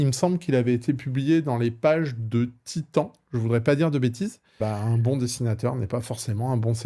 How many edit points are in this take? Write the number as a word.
one